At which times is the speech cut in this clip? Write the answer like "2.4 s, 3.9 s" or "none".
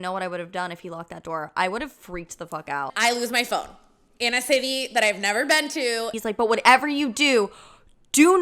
2.9 s, 6.1 s